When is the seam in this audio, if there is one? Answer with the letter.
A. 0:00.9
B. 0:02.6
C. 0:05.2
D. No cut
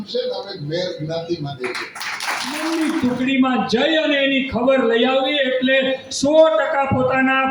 B